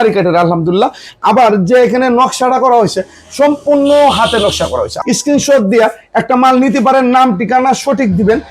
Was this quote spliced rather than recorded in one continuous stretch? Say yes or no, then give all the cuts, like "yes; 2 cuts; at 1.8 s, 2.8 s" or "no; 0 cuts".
yes; 1 cut; at 4.9 s